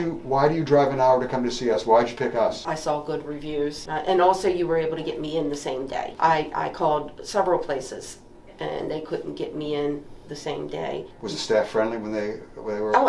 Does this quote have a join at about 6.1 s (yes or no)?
yes